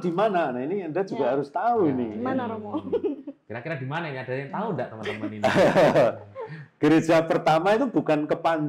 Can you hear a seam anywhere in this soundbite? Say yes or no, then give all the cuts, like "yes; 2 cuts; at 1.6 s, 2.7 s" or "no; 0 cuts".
no; 0 cuts